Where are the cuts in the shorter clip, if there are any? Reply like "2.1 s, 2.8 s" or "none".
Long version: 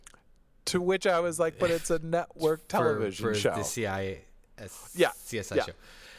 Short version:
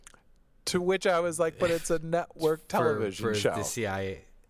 none